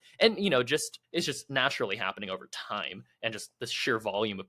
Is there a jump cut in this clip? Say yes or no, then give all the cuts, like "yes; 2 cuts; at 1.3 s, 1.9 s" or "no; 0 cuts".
yes; 1 cut; at 0.9 s